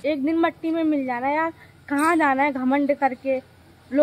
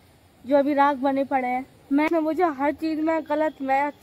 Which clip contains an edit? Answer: second; 1 cut; at 2.1 s

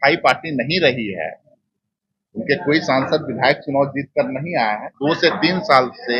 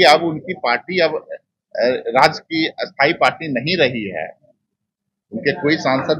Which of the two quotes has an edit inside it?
first; 1 cut; at 4.9 s

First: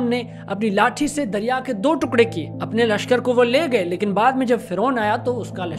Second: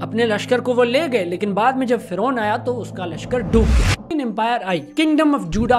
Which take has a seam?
second; 1 cut; at 4.1 s

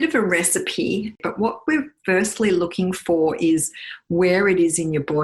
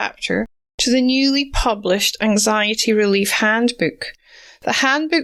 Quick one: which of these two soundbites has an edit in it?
first; 1 cut; at 1.2 s

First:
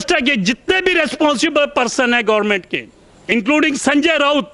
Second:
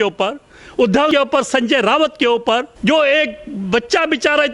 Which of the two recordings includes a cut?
second; 2 cuts; at 1.1 s, 2.7 s

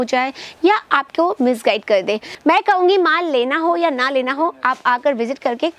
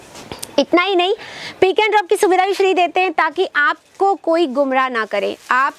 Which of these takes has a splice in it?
first; 1 cut; at 2.2 s

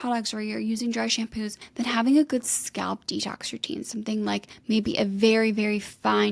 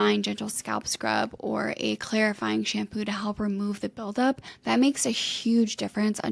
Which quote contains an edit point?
first; 1 cut; at 1.6 s

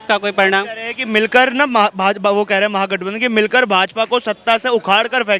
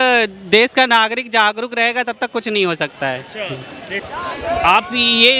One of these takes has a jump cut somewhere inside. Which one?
second; 1 cut; at 4.0 s

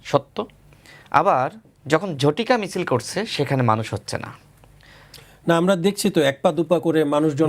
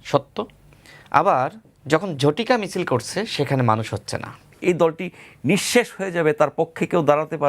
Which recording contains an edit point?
second; 1 cut; at 4.6 s

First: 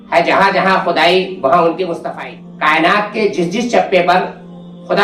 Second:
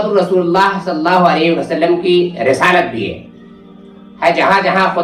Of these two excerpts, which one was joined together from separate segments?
first; 1 cut; at 2.0 s

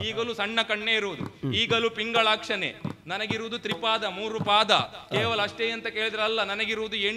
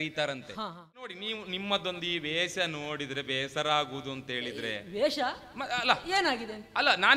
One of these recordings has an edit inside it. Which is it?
second; 1 cut; at 1.1 s

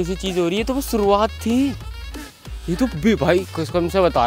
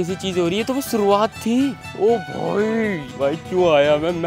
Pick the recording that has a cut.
second; 2 cuts; at 1.9 s, 3.1 s

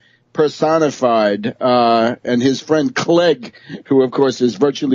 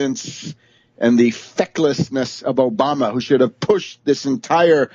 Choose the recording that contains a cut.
first; 1 cut; at 1.5 s

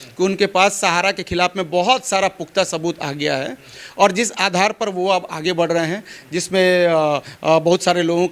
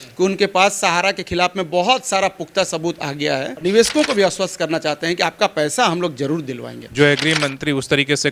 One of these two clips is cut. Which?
second; 2 cuts; at 3.6 s, 6.9 s

